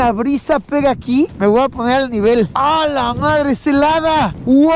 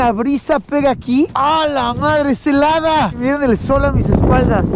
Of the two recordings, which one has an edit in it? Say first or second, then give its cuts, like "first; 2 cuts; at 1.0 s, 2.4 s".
second; 2 cuts; at 1.3 s, 3.2 s